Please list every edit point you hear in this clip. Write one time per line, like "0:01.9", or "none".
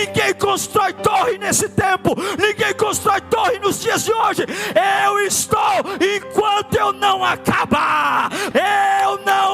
0:08.4